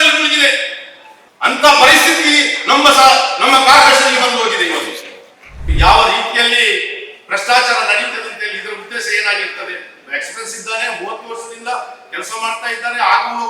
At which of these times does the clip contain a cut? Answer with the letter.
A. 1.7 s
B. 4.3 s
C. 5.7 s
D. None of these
C